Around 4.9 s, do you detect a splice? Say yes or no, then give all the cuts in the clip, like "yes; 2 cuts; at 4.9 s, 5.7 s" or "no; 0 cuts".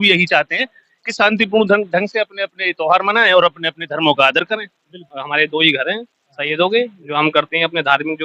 yes; 1 cut; at 4.9 s